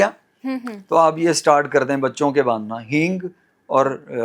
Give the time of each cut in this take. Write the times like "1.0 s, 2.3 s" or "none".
none